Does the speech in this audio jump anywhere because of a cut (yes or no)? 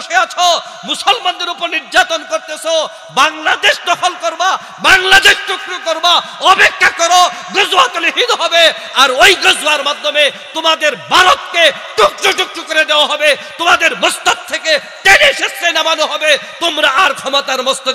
no